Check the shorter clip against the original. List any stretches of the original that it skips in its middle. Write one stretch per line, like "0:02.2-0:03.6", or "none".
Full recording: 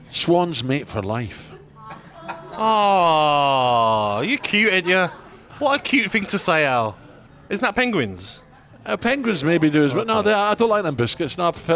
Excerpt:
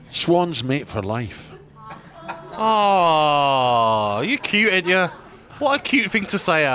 none